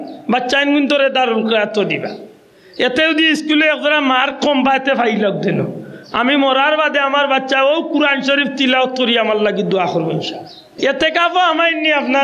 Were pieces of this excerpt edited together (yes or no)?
yes